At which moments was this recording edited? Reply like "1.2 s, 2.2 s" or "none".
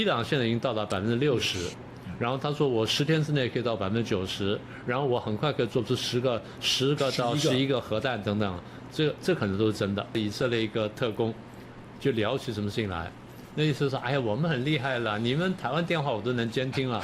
10.2 s